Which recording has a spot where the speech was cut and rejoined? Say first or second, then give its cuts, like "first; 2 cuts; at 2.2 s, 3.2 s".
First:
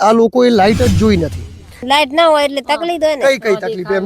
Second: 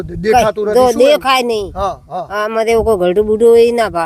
first; 1 cut; at 1.8 s